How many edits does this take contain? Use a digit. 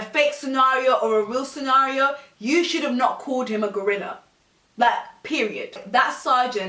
1